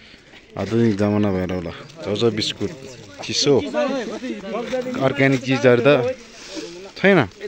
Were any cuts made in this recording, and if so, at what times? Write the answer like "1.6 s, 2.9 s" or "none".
none